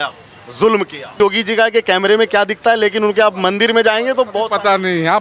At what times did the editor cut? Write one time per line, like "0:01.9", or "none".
0:01.1